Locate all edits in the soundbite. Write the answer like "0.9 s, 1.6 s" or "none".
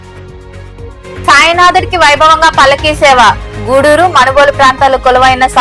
none